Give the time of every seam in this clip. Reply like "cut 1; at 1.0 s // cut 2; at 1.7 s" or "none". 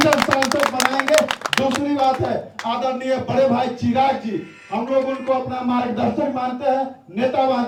none